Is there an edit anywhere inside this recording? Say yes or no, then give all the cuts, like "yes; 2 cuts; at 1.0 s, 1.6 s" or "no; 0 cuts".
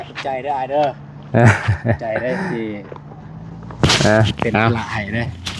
no; 0 cuts